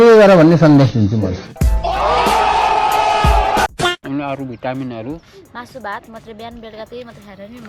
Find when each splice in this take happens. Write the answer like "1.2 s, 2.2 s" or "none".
4.0 s